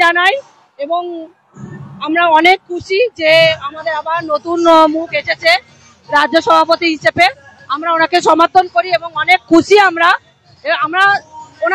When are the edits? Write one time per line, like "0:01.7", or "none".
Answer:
none